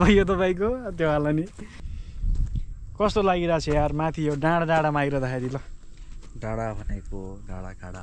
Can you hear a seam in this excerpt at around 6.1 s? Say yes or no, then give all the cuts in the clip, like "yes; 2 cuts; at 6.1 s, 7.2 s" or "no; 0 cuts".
no; 1 cut; at 1.8 s